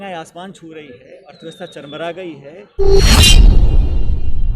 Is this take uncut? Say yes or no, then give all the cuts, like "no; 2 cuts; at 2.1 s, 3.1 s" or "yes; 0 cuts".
no; 1 cut; at 2.8 s